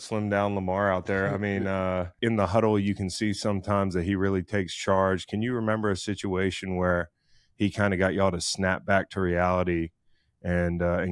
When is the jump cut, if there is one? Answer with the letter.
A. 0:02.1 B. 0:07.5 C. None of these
A